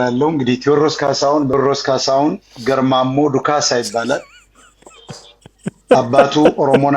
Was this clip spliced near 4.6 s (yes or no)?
no